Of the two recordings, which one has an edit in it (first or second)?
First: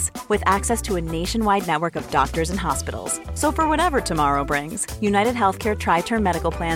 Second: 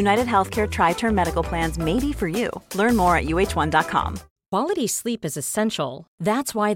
second